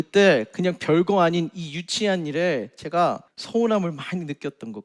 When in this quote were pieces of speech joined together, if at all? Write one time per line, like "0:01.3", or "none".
0:03.3

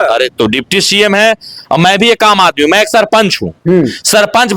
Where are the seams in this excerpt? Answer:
none

